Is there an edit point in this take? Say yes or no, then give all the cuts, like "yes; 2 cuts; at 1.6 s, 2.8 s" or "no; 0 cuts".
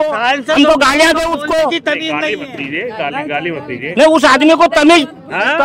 no; 0 cuts